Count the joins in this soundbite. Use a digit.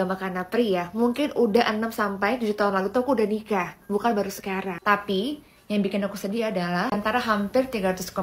1